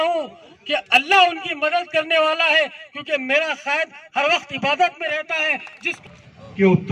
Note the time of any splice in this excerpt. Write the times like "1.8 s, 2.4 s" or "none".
5.9 s